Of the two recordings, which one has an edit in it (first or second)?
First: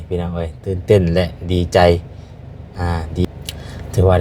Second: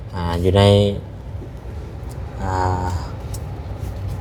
first